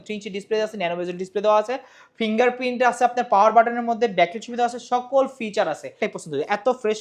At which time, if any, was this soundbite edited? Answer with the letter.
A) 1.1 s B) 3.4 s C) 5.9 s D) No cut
C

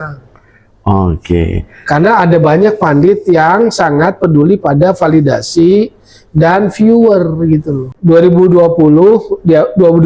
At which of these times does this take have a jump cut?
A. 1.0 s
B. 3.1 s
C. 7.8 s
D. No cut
C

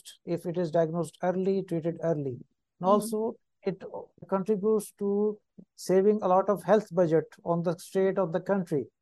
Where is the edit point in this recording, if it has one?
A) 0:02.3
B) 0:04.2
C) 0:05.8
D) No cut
B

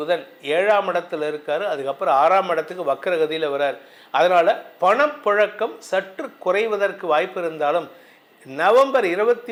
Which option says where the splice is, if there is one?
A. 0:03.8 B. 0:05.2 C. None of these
C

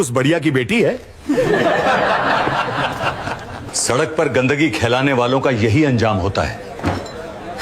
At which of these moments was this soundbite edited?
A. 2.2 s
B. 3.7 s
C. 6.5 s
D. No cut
B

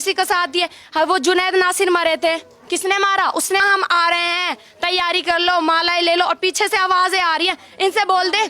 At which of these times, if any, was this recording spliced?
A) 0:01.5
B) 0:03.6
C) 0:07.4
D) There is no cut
B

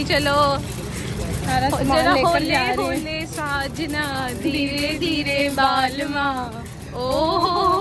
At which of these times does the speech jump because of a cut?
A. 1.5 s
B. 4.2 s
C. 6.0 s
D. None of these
D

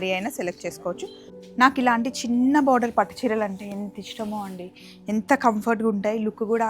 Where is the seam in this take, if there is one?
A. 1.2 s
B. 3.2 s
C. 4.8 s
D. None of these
A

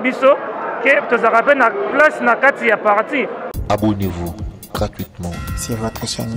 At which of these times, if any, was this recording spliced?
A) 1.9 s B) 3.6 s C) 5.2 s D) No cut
B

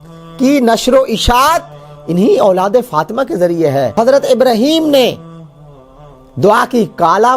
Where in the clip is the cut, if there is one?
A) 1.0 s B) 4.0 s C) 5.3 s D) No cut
B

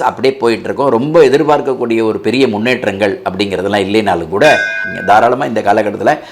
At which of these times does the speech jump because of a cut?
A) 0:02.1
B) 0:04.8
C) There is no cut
B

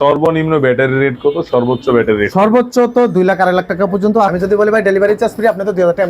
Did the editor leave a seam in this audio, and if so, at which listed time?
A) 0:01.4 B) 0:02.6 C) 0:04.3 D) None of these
C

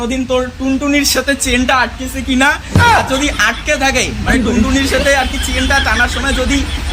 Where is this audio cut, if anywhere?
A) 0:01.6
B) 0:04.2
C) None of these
C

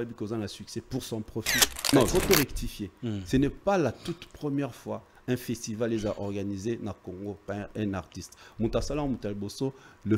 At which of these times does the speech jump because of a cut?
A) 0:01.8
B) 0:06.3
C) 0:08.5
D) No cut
A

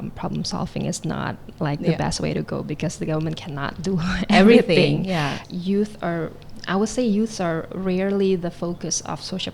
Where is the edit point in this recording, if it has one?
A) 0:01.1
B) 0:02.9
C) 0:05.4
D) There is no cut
C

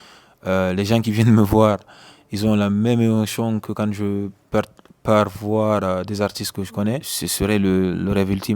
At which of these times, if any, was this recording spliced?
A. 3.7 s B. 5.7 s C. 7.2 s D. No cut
C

